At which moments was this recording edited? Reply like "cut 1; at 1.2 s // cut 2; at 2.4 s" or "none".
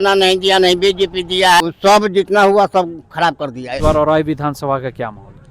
cut 1; at 1.6 s // cut 2; at 3.8 s